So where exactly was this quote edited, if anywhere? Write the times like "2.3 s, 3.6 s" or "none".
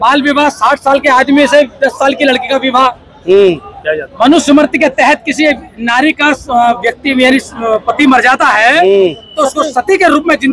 none